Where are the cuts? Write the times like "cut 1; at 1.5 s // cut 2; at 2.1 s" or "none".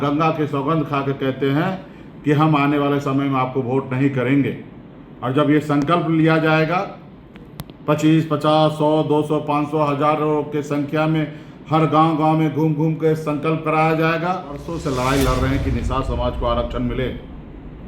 cut 1; at 14.7 s